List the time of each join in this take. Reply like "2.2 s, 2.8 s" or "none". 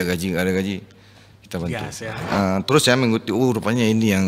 2.3 s